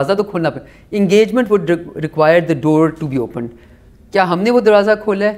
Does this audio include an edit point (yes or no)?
no